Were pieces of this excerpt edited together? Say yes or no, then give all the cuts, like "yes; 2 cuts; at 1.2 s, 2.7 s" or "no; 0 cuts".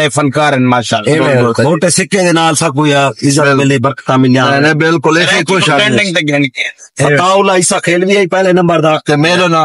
no; 0 cuts